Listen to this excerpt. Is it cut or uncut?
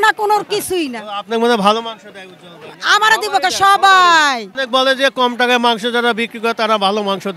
cut